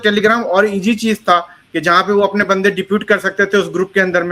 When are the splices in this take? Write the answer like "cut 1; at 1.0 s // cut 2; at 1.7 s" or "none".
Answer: none